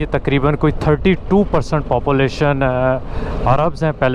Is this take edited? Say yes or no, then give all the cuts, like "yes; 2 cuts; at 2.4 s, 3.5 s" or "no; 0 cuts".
no; 0 cuts